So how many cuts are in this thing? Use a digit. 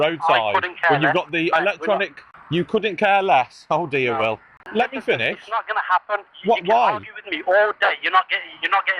1